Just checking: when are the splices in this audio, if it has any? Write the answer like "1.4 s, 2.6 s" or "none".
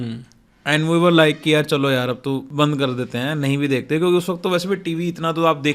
2.5 s